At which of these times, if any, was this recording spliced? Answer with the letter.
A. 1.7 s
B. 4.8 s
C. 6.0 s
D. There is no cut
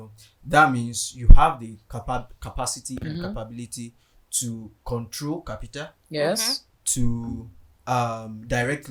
D